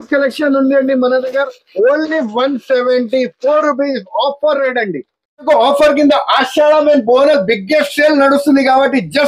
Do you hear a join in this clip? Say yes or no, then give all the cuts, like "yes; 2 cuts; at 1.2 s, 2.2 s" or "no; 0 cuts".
yes; 1 cut; at 5.5 s